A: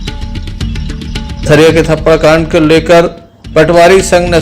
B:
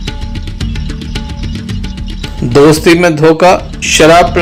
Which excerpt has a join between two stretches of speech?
A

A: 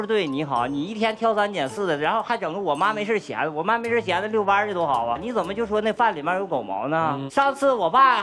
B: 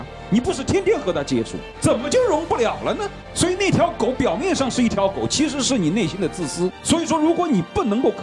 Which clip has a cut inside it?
A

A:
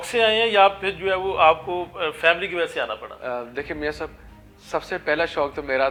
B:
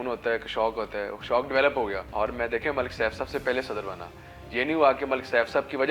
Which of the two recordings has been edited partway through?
B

